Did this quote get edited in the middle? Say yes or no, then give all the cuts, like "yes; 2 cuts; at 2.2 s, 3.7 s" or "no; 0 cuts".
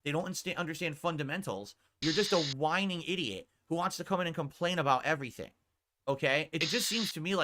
yes; 2 cuts; at 1.9 s, 6.6 s